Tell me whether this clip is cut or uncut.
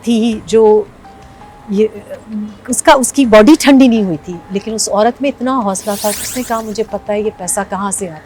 cut